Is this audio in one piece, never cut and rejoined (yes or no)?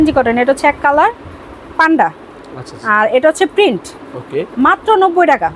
yes